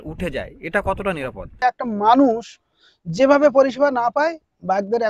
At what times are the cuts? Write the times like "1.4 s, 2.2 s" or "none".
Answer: 1.6 s